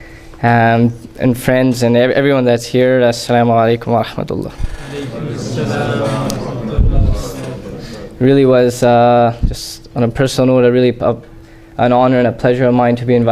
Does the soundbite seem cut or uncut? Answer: uncut